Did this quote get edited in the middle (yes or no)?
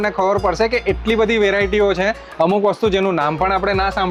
no